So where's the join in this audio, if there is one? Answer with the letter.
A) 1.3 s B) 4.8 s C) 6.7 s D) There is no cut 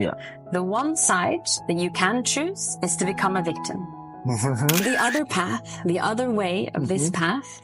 B